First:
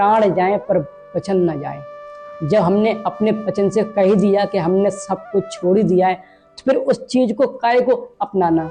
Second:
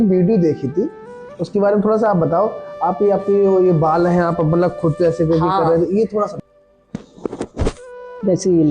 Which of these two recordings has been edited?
second; 1 cut; at 6.3 s

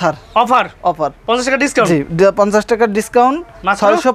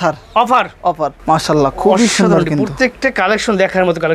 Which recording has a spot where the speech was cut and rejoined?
second; 1 cut; at 1.2 s

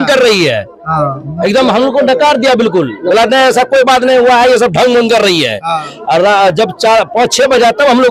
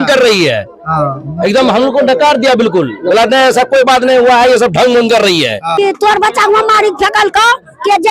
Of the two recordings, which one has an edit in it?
second; 1 cut; at 5.8 s

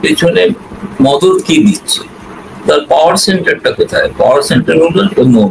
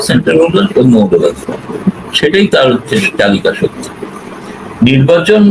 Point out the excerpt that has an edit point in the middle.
second; 1 cut; at 4.2 s

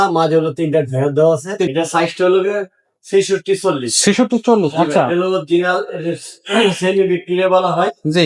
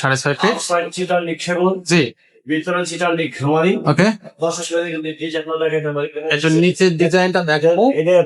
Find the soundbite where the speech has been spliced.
first; 1 cut; at 1.7 s

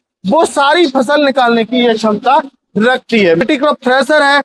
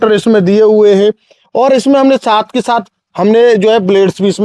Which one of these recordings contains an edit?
first; 1 cut; at 3.4 s

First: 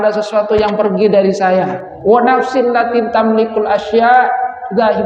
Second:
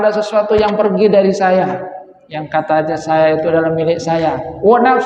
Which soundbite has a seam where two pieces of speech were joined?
first; 1 cut; at 1.9 s

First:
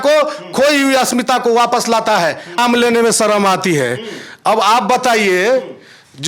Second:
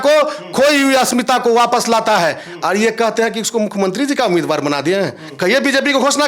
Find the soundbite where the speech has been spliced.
first; 1 cut; at 2.6 s

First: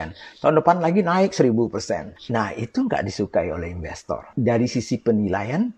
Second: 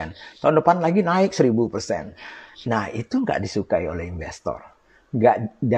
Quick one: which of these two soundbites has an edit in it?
first; 2 cuts; at 2.1 s, 4.3 s

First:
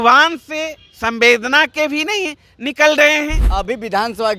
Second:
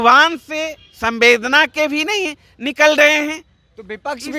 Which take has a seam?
first; 1 cut; at 3.4 s

